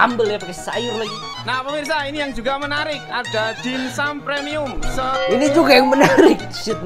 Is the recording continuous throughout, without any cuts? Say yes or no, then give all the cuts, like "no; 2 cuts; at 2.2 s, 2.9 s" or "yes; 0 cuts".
no; 1 cut; at 1.5 s